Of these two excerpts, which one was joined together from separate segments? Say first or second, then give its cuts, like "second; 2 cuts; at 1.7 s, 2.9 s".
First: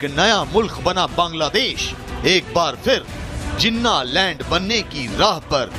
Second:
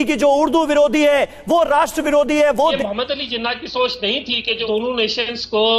second; 2 cuts; at 2.8 s, 4.6 s